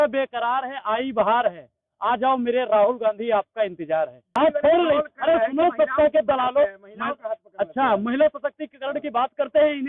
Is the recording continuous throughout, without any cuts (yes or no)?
no